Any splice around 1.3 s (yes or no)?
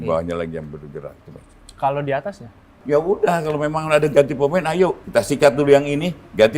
no